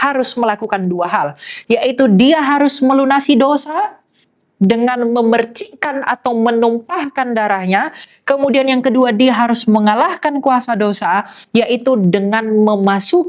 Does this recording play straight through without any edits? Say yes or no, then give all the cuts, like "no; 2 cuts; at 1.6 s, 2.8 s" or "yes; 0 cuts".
yes; 0 cuts